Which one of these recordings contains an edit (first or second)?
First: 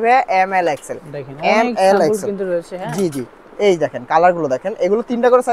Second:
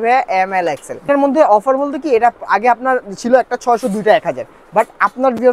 second